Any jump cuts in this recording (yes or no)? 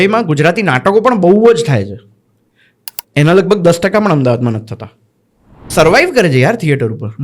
yes